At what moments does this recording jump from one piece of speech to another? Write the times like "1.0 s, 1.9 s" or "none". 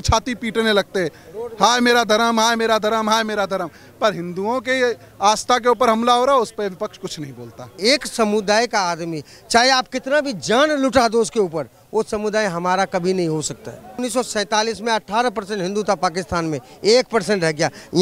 7.8 s, 14.1 s